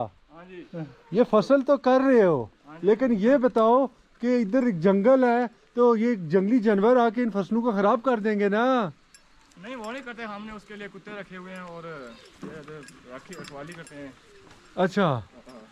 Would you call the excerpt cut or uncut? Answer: uncut